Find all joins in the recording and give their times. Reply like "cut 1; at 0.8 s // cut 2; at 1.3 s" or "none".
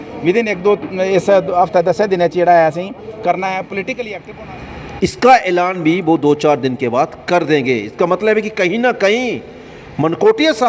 cut 1; at 4.2 s